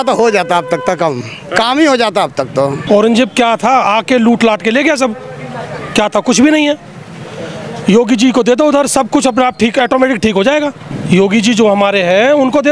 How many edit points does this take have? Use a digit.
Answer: 2